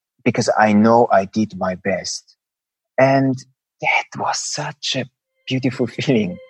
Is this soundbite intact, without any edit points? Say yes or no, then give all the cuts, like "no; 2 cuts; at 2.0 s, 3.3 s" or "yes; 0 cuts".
yes; 0 cuts